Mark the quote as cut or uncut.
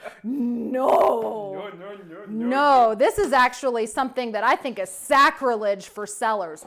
uncut